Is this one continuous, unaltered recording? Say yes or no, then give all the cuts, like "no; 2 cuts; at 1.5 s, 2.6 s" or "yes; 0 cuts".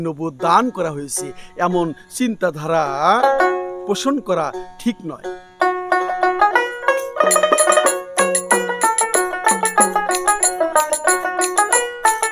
yes; 0 cuts